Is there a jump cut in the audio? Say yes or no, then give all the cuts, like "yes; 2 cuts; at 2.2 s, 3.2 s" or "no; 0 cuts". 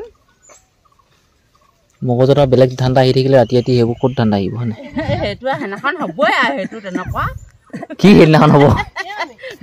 yes; 1 cut; at 4.9 s